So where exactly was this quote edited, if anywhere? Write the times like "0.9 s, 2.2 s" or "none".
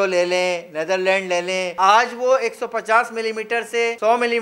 1.7 s